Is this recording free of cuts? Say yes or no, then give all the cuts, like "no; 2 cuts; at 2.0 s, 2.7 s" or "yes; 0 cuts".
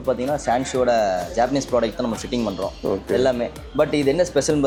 yes; 0 cuts